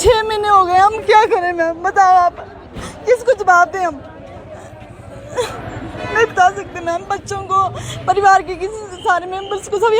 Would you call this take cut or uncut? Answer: uncut